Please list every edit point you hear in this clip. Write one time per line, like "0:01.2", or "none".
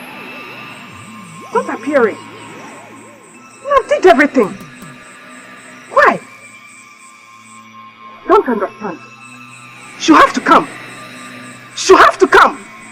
none